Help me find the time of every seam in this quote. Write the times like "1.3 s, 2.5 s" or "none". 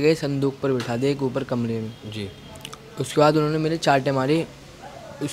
none